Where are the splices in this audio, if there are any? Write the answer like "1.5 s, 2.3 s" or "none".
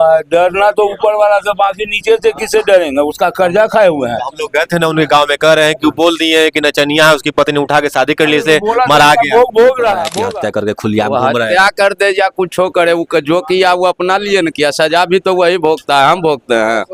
10.1 s